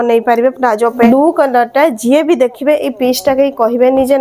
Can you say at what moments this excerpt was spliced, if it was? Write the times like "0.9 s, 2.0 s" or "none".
0.9 s